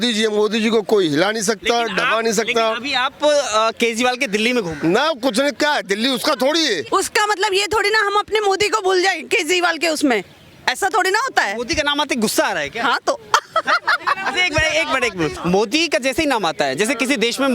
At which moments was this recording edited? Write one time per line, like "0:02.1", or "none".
0:06.8
0:15.4